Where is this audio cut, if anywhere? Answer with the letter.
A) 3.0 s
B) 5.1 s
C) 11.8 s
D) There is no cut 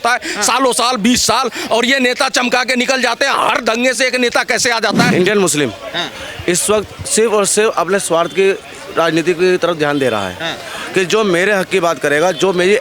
B